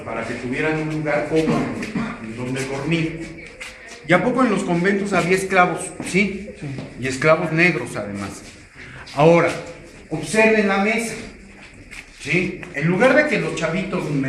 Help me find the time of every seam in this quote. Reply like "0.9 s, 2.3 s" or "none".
10.4 s